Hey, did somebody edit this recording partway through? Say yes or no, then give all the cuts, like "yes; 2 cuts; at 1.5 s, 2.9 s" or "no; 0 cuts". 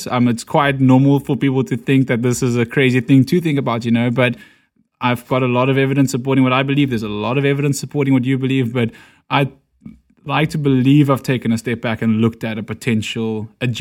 yes; 1 cut; at 4.5 s